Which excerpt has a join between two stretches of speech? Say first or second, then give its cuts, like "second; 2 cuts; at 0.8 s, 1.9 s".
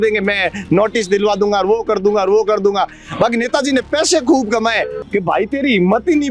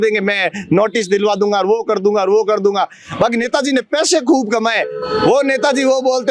first; 1 cut; at 5.0 s